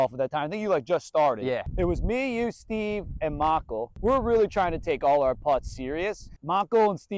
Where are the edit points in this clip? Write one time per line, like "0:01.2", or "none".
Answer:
0:01.4
0:03.9
0:06.3